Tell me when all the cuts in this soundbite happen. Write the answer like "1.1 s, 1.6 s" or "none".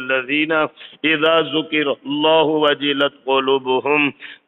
none